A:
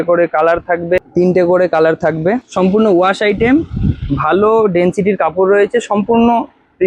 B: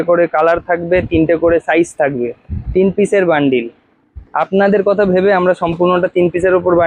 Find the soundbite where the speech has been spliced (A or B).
A